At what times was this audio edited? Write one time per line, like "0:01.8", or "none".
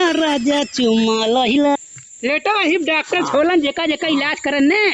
0:01.8